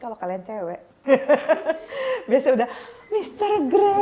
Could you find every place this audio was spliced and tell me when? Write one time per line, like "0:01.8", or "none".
0:00.9